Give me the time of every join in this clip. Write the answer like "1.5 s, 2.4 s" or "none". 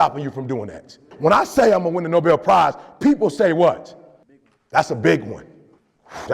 1.1 s

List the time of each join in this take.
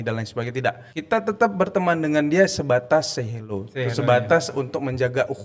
0.9 s

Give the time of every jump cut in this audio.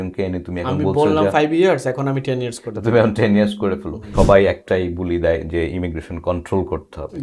4.0 s

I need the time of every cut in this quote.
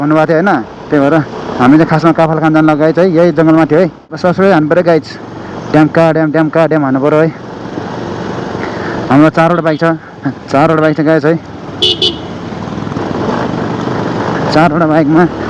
4.2 s

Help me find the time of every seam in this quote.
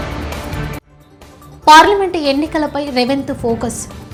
none

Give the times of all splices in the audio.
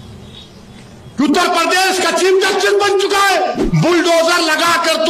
3.6 s

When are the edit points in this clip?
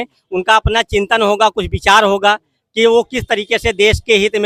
none

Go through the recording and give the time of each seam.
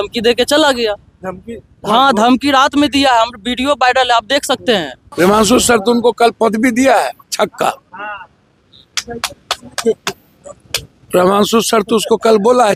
5.0 s

